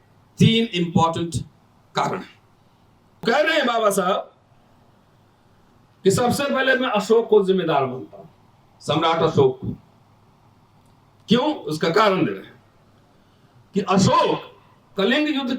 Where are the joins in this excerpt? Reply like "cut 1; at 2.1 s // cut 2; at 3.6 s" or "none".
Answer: cut 1; at 3.2 s